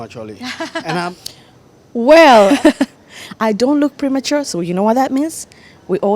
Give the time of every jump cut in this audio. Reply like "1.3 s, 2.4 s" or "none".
1.0 s, 2.5 s